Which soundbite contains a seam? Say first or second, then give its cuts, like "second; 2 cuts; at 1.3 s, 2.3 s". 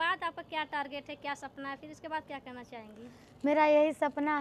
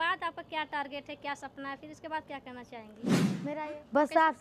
second; 1 cut; at 3.3 s